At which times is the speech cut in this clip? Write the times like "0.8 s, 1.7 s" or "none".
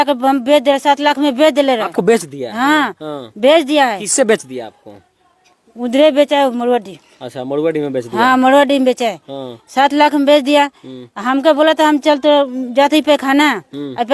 none